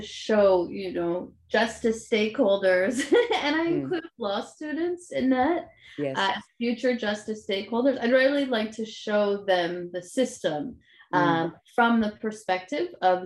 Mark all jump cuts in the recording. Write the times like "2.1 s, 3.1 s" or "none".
none